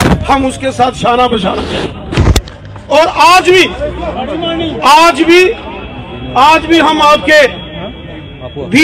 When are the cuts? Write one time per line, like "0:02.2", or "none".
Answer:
none